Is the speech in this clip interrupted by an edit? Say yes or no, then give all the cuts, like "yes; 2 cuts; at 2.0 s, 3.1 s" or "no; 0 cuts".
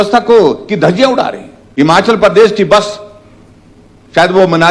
yes; 1 cut; at 1.6 s